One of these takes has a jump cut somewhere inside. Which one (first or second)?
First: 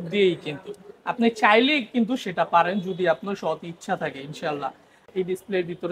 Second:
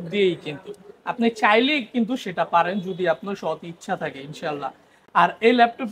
first